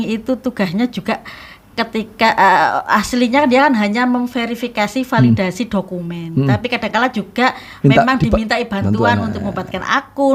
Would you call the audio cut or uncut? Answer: uncut